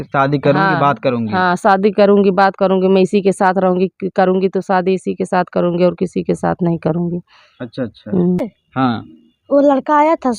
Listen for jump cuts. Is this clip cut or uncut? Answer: cut